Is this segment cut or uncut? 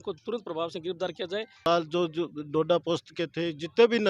cut